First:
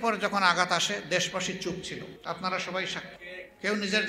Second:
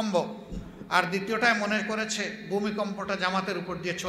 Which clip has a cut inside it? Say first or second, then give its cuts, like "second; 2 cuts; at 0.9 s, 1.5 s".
first; 2 cuts; at 2.1 s, 3.2 s